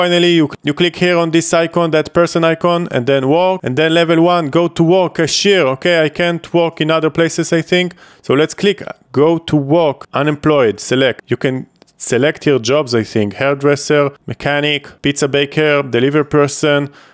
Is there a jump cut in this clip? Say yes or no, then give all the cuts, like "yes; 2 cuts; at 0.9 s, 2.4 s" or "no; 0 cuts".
no; 0 cuts